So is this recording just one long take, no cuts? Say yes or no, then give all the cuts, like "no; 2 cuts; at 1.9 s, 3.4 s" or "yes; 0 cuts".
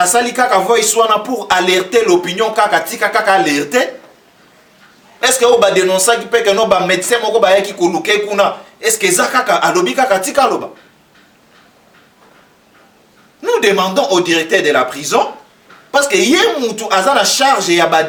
yes; 0 cuts